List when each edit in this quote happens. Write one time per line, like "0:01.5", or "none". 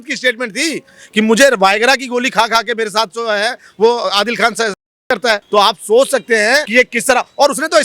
0:05.4
0:06.7